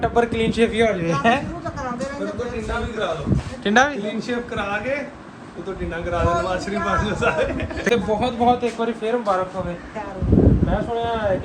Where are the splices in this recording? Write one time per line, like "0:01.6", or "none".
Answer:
0:07.9